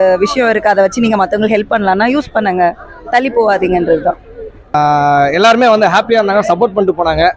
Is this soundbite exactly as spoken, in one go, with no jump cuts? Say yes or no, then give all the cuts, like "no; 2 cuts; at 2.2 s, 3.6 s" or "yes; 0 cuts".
no; 1 cut; at 4.7 s